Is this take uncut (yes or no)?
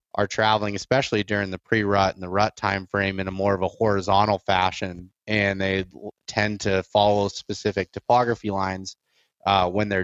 yes